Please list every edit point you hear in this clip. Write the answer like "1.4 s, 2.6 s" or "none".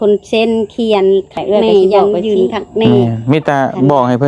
2.9 s

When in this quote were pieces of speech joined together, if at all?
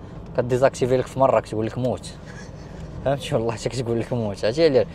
none

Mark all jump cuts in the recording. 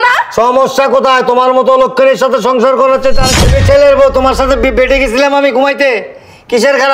3.3 s

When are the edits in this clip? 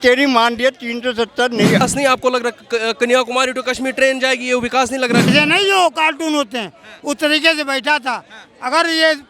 1.8 s, 5.3 s

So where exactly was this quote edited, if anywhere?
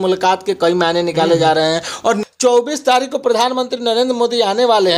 2.2 s

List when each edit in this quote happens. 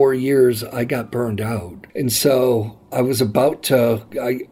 1.8 s

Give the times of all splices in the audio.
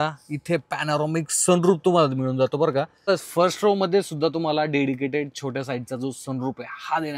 3.1 s

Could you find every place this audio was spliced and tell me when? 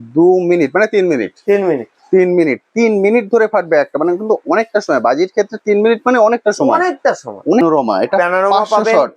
7.6 s

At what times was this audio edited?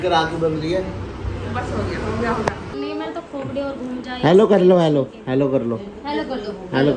2.7 s

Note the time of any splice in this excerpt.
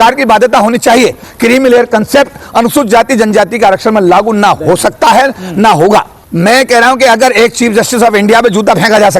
1.2 s, 6.2 s

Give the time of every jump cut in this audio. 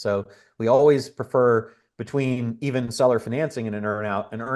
none

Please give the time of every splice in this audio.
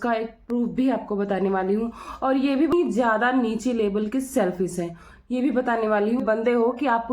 2.7 s, 6.2 s

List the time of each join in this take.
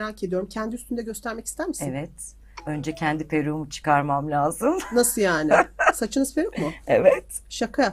none

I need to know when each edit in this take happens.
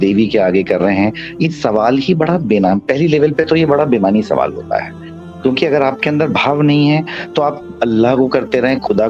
none

